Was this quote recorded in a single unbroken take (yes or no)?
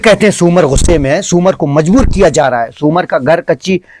yes